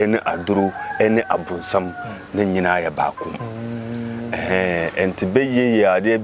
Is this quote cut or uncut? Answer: uncut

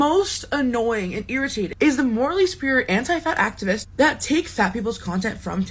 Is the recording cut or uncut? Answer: uncut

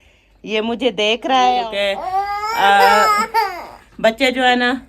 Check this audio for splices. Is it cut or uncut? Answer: cut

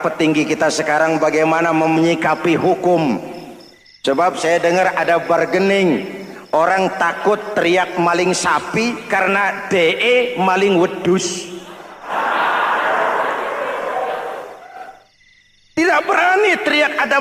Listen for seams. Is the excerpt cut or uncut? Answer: uncut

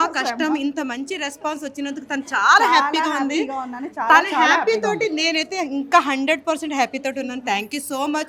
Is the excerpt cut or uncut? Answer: uncut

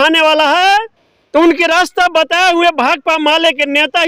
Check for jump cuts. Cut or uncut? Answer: uncut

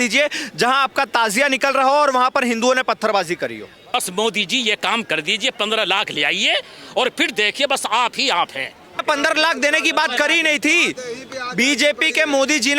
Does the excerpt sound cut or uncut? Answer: cut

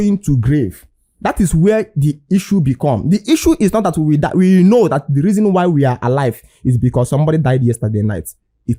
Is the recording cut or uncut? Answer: uncut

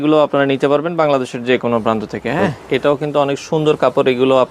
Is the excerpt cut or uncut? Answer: cut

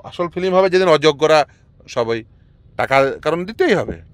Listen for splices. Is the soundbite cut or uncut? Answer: uncut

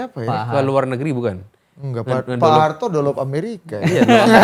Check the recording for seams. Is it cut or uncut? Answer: uncut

